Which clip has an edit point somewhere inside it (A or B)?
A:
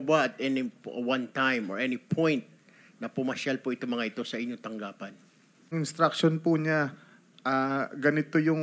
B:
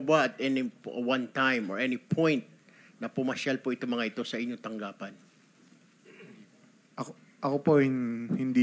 A